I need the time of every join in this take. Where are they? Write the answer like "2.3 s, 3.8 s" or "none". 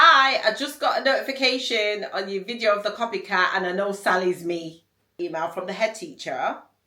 5.1 s

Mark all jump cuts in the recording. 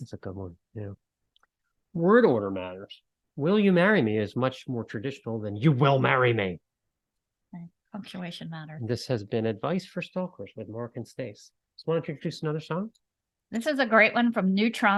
none

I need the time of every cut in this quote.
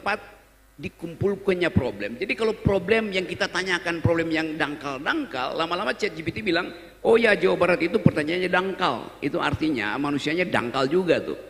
none

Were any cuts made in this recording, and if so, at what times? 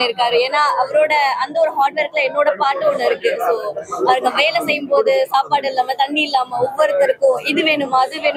none

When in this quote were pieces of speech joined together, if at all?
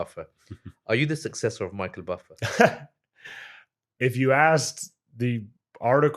none

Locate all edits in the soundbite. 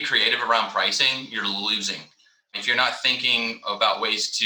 2.5 s

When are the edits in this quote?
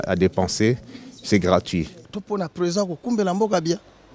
2.0 s

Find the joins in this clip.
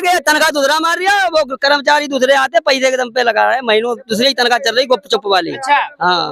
none

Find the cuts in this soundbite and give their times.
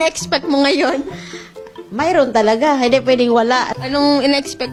none

